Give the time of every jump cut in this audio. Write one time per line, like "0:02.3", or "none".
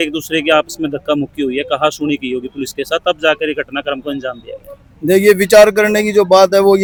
none